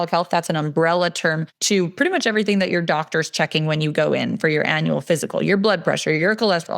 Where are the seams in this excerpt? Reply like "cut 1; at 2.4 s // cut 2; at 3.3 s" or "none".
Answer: cut 1; at 1.5 s